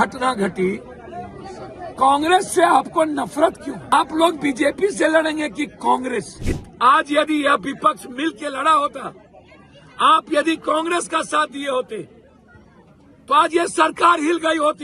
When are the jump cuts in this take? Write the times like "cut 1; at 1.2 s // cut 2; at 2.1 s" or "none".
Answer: cut 1; at 3.9 s // cut 2; at 6.3 s